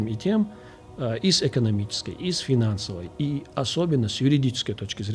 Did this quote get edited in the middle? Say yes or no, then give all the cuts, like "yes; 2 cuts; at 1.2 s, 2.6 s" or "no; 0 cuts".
no; 0 cuts